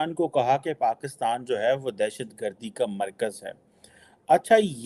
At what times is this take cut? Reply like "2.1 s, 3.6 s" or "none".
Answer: none